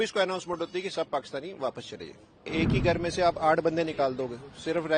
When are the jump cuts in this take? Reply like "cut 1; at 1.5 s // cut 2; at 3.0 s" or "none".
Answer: cut 1; at 2.5 s